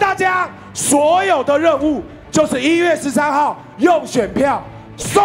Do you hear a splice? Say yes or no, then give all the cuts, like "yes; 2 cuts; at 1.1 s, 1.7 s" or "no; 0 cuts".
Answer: no; 0 cuts